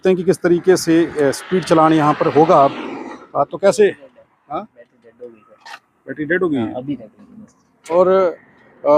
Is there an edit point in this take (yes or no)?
yes